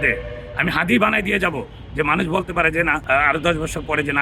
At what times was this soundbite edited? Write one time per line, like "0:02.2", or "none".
0:03.0